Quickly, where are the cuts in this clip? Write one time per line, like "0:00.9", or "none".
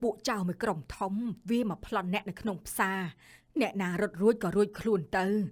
none